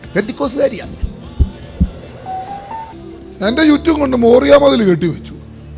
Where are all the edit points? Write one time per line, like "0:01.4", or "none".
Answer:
0:03.0